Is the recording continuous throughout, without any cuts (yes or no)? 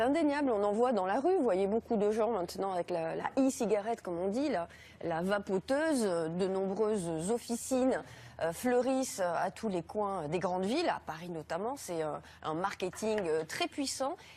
no